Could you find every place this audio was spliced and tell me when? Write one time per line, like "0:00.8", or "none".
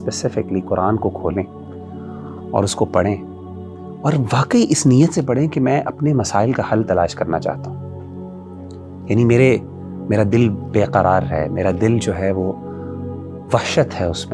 none